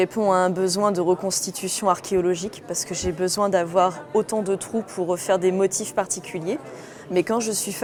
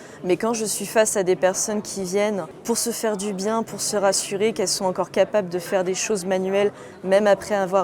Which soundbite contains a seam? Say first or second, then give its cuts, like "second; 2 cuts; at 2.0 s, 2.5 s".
second; 1 cut; at 2.5 s